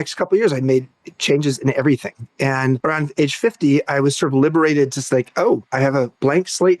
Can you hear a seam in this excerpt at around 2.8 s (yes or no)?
yes